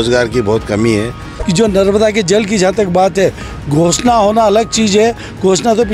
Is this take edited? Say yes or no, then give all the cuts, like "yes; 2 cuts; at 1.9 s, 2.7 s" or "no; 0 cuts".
yes; 1 cut; at 1.3 s